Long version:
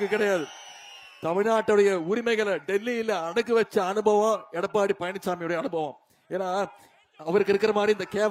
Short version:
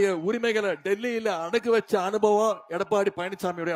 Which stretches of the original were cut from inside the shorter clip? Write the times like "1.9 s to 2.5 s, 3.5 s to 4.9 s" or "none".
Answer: none

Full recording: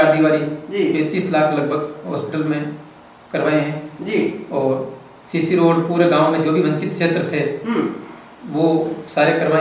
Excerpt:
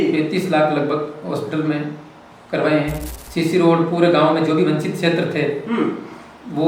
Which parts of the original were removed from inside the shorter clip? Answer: 3.9 s to 5.1 s

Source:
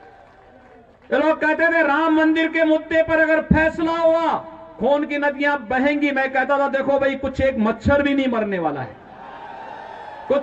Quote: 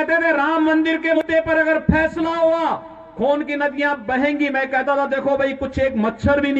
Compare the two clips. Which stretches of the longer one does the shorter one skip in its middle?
2.6 s to 2.8 s

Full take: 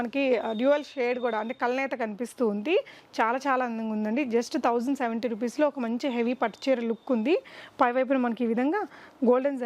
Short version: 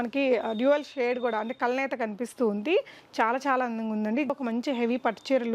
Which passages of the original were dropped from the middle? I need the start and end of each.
4.3 s to 5.7 s

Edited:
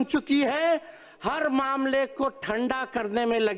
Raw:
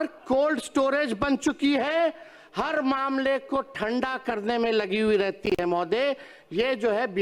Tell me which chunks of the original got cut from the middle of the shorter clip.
none

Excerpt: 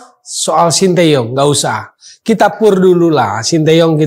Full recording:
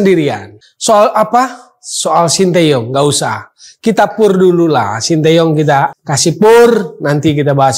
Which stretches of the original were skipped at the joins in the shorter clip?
none

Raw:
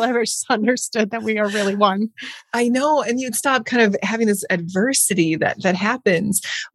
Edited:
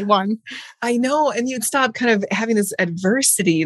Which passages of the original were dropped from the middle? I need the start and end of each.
none

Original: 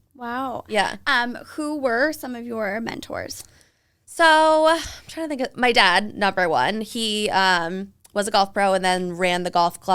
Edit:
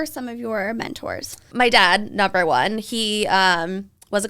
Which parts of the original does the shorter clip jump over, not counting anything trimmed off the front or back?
3.5 s to 5.5 s

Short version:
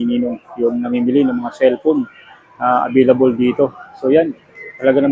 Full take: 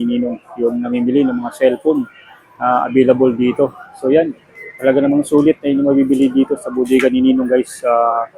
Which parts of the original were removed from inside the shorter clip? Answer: none

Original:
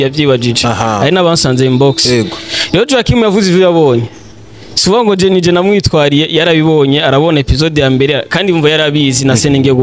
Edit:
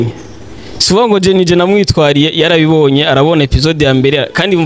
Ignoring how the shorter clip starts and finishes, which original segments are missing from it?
none

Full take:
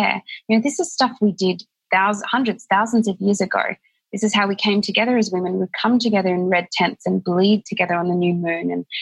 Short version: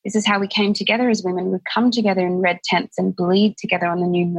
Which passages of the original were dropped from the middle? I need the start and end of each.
none

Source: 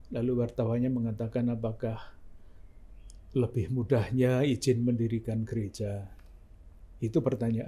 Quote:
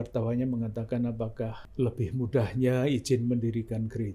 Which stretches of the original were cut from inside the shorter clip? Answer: 2.0 s to 3.2 s

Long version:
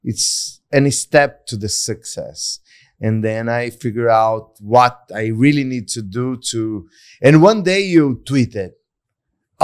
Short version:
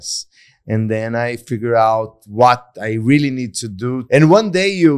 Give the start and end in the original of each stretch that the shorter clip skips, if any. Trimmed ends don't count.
6.4 s to 7.1 s

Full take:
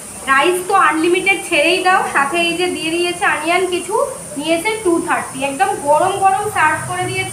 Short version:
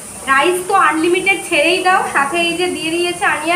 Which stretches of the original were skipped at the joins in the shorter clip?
none

